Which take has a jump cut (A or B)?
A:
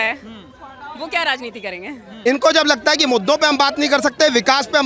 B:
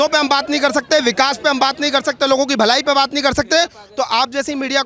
A